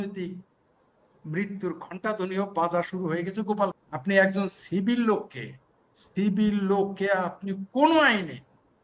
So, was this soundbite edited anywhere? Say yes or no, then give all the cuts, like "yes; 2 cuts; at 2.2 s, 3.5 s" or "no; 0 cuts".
yes; 1 cut; at 3.7 s